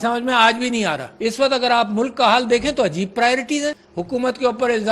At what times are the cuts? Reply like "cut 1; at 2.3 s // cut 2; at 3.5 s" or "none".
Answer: cut 1; at 1.1 s // cut 2; at 3.9 s